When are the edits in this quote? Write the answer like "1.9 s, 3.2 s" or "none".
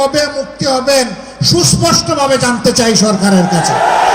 none